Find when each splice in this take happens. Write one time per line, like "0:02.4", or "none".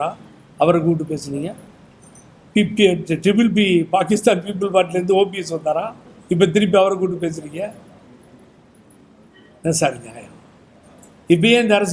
none

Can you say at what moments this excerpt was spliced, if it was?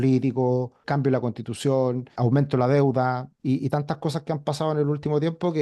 0:00.8
0:02.1
0:03.3

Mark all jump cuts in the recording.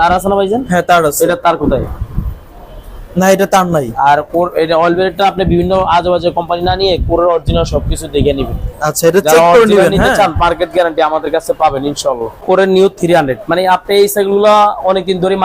0:12.4

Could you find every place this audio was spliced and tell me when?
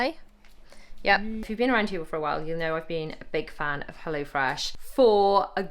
0:01.4
0:04.7

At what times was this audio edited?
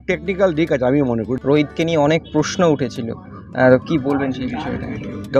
0:01.3

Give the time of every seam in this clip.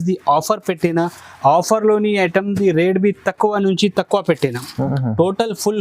0:04.9

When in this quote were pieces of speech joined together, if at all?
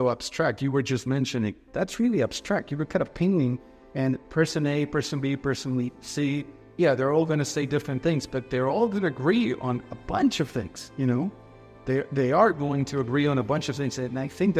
none

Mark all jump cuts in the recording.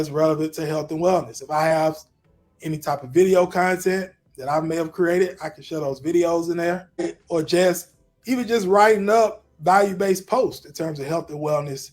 0:07.2

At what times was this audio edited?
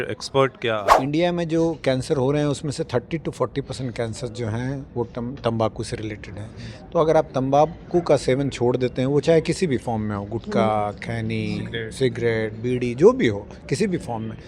0:00.9

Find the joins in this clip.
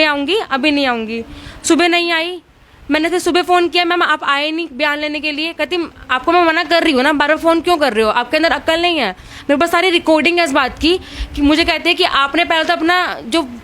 none

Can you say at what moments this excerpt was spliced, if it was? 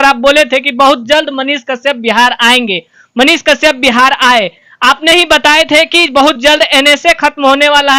none

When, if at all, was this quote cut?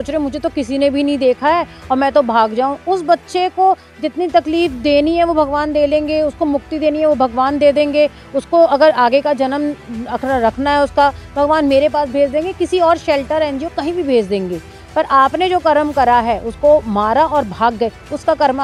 none

